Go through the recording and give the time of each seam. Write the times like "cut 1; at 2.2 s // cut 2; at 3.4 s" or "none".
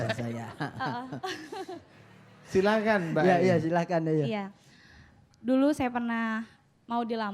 cut 1; at 1.9 s